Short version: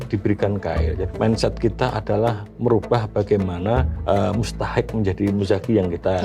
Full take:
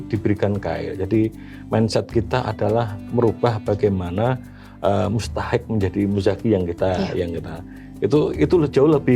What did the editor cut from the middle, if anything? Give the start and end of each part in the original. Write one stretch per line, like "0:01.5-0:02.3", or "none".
0:01.0-0:01.5
0:04.5-0:04.7